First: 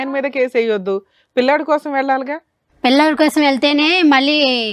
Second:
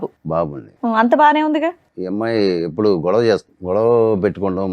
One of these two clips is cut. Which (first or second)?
second